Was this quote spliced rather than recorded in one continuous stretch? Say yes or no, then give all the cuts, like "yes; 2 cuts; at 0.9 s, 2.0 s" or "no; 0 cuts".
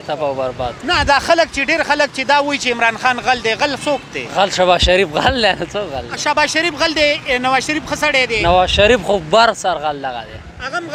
no; 0 cuts